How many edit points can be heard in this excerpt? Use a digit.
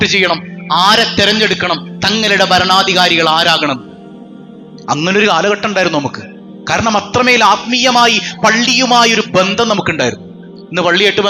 0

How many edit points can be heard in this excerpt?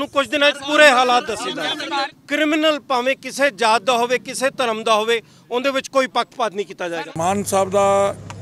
2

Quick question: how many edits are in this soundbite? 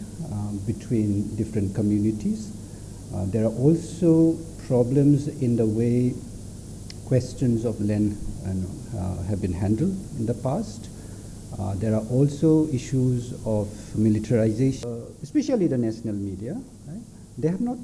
1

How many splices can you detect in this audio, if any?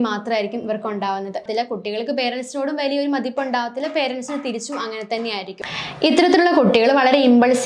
1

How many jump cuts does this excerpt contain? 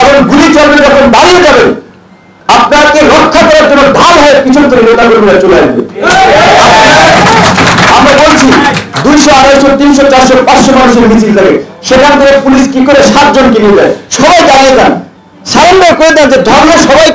0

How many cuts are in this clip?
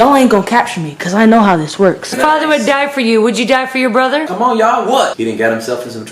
3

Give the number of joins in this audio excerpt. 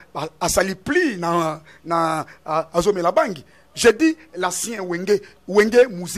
0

